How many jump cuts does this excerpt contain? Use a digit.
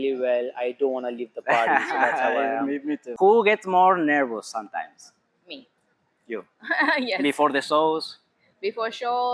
1